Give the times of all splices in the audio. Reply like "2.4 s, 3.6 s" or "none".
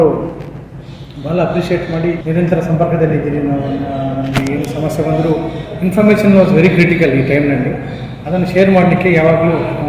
2.2 s